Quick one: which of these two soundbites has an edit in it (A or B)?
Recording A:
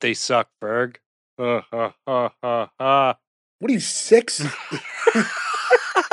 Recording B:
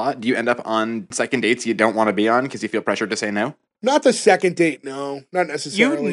B